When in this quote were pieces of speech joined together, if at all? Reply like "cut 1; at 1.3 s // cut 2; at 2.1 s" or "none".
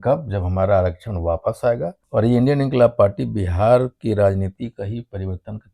cut 1; at 2.0 s